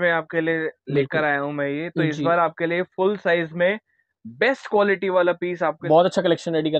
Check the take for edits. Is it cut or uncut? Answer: cut